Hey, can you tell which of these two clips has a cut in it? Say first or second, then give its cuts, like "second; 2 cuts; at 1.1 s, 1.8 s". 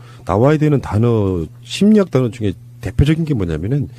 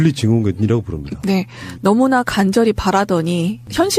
first; 1 cut; at 2.8 s